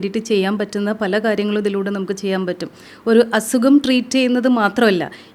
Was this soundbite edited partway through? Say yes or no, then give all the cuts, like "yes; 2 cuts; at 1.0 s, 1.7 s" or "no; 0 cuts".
no; 0 cuts